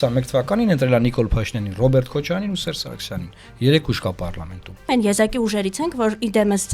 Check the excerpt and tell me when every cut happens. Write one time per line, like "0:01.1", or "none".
0:04.9

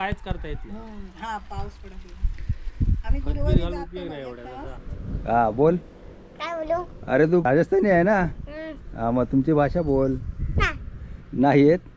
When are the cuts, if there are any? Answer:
0:04.8
0:07.4

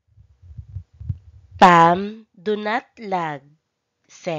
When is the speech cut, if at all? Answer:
0:02.7

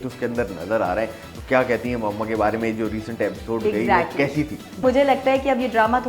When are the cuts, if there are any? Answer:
0:04.8

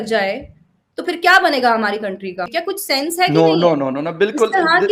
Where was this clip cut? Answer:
0:02.6

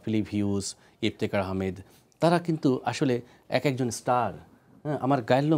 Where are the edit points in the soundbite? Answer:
none

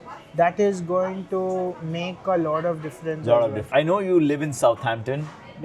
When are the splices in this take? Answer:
0:03.7

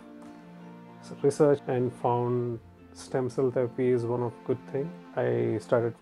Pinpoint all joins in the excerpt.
0:01.6
0:05.1

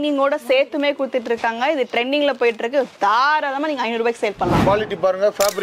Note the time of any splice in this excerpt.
0:04.6

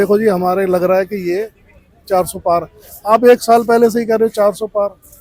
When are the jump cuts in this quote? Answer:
none

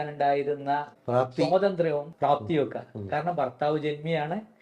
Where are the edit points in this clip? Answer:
0:00.9
0:02.1

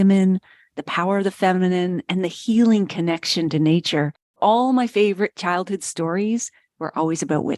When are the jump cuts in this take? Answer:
0:04.4

